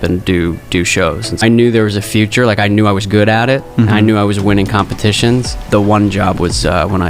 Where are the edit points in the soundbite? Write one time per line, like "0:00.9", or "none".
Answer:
0:01.4
0:05.6